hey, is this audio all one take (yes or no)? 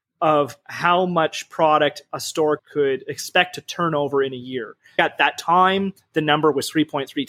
no